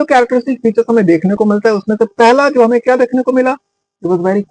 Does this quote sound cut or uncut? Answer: uncut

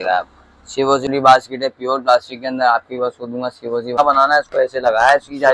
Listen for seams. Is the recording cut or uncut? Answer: cut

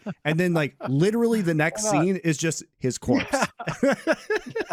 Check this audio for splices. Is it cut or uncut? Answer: uncut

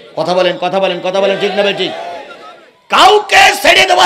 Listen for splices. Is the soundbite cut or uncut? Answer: uncut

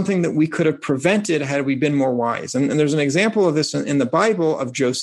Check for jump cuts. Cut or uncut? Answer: uncut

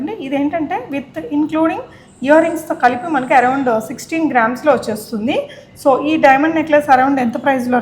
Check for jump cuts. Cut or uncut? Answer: uncut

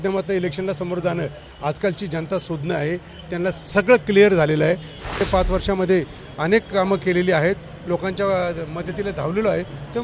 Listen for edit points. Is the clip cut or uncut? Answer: cut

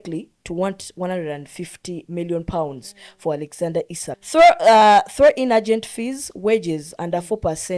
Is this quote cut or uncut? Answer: cut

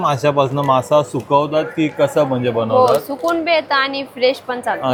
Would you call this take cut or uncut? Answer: uncut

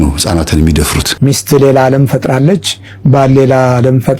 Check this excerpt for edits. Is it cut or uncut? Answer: cut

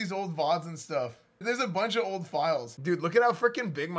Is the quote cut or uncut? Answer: cut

